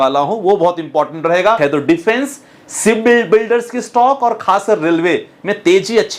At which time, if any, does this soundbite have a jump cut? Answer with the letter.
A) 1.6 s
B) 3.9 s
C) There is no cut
A